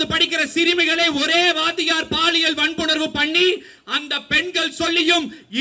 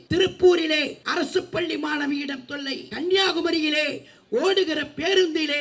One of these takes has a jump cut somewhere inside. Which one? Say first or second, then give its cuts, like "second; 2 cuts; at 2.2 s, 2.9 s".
second; 2 cuts; at 1.0 s, 2.8 s